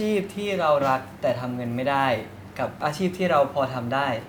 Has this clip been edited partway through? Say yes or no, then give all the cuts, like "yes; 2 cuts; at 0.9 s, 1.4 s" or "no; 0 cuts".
no; 0 cuts